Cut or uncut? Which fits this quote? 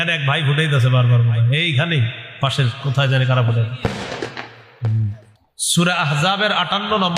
cut